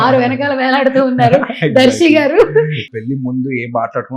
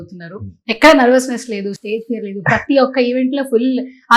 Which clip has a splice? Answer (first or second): first